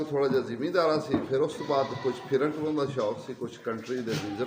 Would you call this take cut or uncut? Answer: uncut